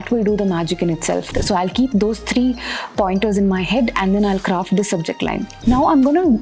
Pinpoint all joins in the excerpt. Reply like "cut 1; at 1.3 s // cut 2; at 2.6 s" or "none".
cut 1; at 1.4 s // cut 2; at 5.5 s